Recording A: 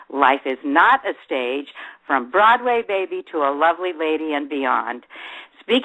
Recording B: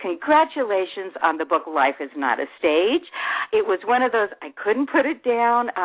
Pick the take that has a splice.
B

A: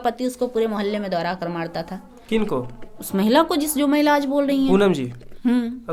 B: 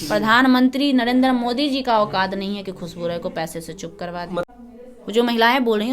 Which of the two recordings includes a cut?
B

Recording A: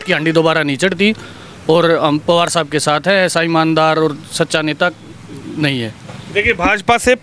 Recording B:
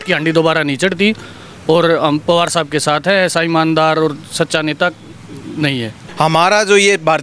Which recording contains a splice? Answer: B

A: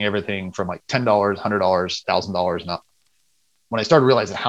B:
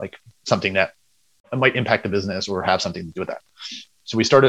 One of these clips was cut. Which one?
B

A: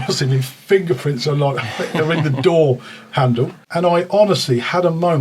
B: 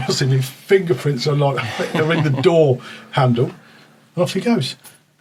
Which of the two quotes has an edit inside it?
A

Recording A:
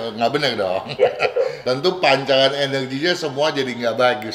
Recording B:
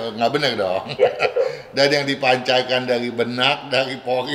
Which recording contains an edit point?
A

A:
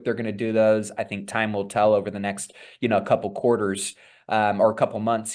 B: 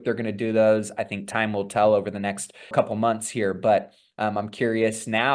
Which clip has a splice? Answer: B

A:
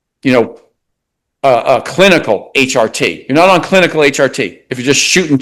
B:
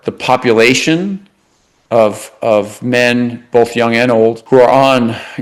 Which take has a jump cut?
B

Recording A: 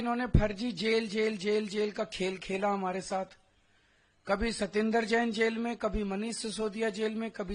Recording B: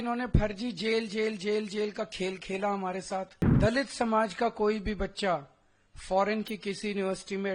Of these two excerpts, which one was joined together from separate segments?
B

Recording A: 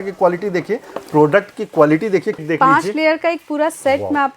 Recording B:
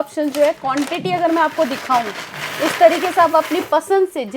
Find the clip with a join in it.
A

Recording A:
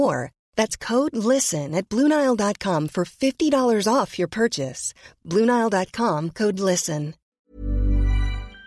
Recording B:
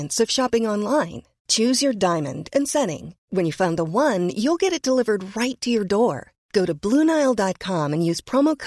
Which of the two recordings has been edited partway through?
A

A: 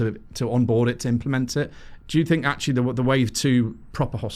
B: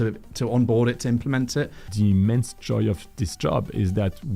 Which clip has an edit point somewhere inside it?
B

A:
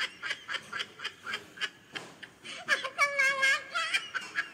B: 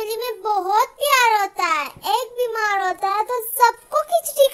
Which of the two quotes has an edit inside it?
B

